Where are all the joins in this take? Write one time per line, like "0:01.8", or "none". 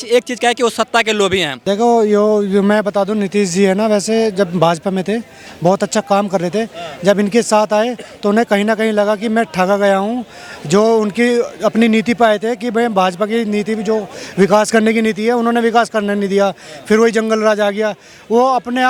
none